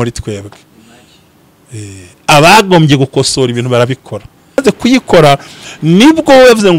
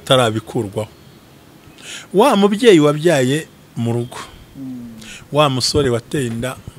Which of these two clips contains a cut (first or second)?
first